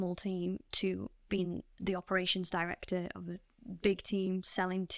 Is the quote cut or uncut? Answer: uncut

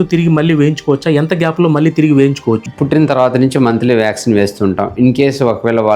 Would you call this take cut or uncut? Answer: cut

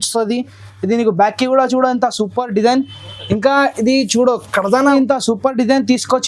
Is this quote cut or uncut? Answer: cut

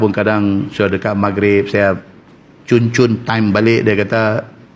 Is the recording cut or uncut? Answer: uncut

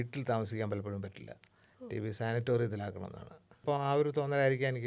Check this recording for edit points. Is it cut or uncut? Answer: cut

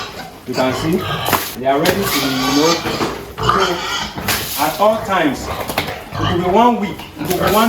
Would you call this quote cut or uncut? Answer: cut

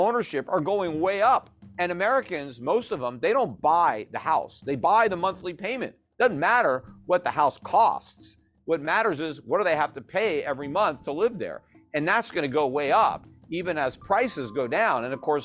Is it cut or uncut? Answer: cut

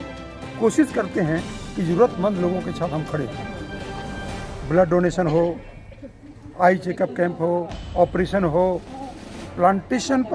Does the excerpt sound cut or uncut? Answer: uncut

